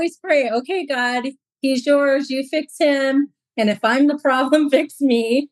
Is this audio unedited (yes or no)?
yes